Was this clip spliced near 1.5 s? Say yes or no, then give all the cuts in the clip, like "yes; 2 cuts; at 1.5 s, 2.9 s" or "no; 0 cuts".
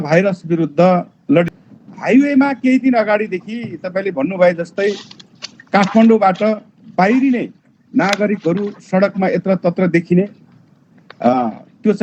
yes; 1 cut; at 1.5 s